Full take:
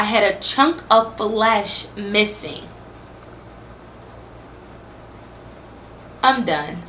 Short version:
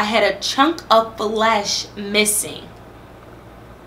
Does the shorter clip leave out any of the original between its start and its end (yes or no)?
no